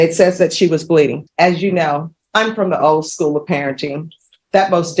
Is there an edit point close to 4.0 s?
no; 2 cuts; at 1.2 s, 2.2 s

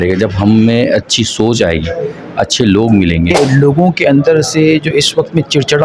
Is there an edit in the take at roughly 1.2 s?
no; 1 cut; at 3.3 s

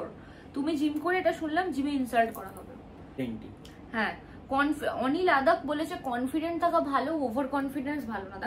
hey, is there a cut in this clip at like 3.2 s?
yes; 1 cut; at 3.2 s

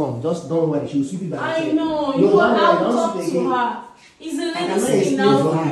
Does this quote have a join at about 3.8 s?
no; 0 cuts

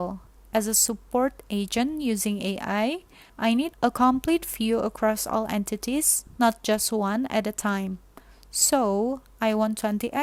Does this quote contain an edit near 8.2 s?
no; 0 cuts

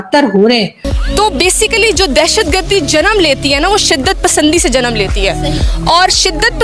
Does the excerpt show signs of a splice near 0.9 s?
yes; 1 cut; at 0.9 s

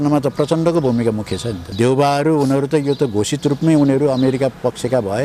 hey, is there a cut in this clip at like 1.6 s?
yes; 1 cut; at 1.6 s

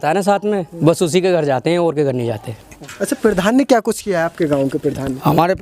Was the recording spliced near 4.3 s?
no; 1 cut; at 2.6 s

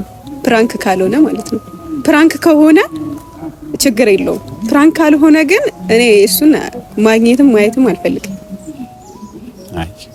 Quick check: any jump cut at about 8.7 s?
no; 0 cuts

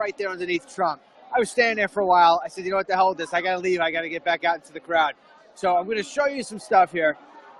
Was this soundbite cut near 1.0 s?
no; 1 cut; at 6.1 s

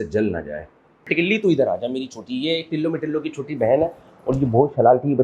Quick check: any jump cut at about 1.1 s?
yes; 1 cut; at 1.1 s

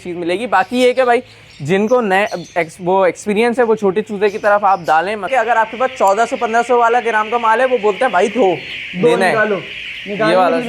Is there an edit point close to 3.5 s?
no; 1 cut; at 5.3 s

